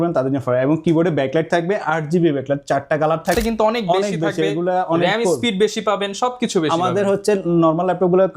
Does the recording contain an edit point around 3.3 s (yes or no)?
yes